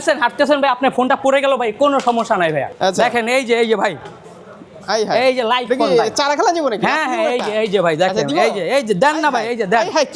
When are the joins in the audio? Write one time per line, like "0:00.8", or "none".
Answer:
0:02.7

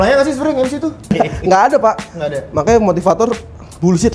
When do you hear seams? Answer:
0:01.1

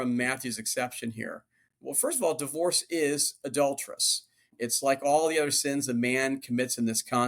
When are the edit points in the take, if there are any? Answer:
0:04.5

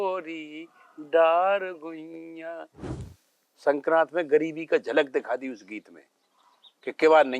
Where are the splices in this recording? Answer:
0:02.9

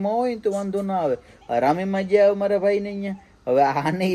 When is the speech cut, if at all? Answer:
none

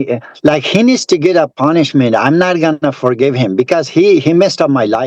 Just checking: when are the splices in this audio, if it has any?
none

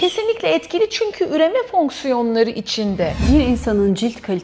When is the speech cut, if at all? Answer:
0:03.2

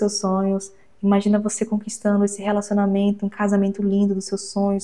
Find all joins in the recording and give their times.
none

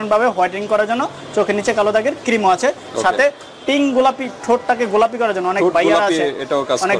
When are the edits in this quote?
none

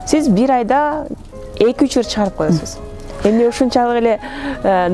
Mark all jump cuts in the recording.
none

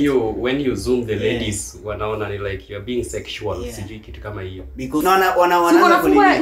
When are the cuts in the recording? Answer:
0:05.0

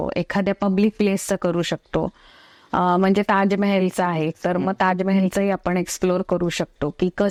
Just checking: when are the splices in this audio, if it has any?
none

